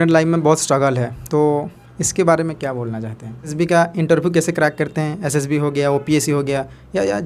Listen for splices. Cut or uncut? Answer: cut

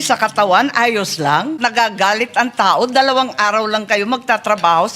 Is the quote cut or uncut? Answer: cut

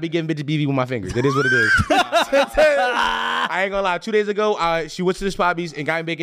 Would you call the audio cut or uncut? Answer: uncut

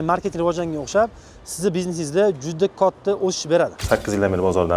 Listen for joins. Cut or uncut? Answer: cut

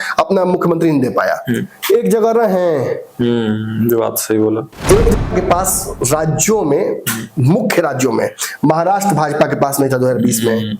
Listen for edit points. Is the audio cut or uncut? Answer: cut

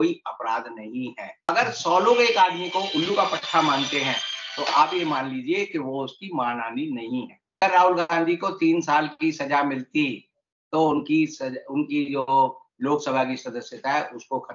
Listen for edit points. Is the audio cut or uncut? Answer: cut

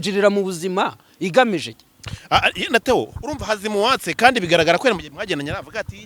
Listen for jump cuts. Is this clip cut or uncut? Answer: cut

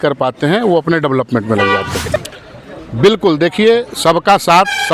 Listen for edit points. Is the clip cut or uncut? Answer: cut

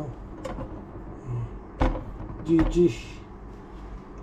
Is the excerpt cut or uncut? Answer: uncut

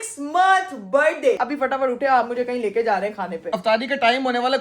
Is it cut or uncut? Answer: cut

